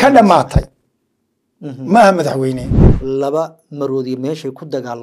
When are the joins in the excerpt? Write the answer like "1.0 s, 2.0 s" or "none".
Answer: 2.9 s